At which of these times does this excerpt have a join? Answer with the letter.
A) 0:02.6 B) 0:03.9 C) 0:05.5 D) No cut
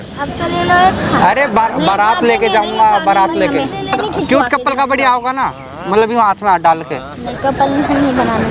B